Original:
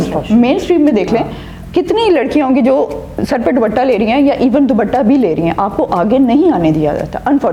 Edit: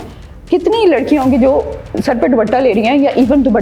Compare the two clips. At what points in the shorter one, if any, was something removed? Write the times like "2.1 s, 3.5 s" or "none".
none